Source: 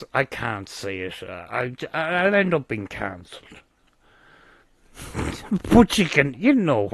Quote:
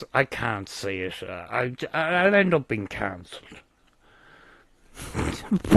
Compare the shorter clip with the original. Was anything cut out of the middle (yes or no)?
no